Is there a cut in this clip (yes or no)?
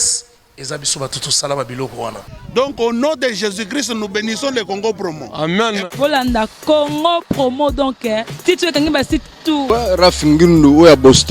yes